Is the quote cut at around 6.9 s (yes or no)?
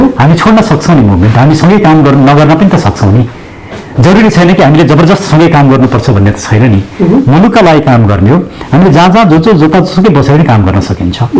no